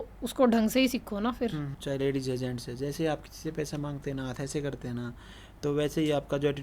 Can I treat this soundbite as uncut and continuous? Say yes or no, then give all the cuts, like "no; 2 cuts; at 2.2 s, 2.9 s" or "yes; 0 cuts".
no; 1 cut; at 1.6 s